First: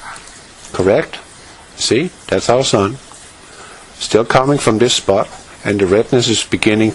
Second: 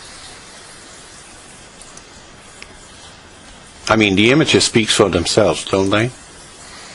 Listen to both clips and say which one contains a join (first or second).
second